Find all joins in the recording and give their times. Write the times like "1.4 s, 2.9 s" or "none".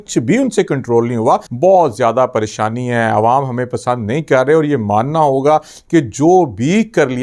1.5 s